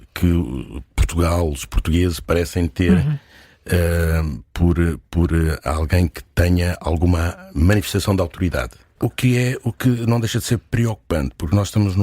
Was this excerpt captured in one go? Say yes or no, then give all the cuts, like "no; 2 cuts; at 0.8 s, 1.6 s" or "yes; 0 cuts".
no; 1 cut; at 8.9 s